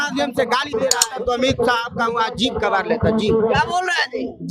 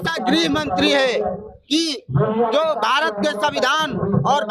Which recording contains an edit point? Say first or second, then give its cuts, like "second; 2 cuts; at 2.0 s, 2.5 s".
first; 1 cut; at 1.0 s